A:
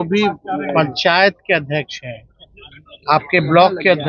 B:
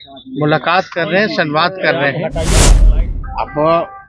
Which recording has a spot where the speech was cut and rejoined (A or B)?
B